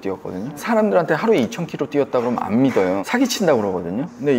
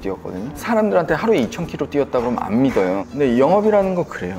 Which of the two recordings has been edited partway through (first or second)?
second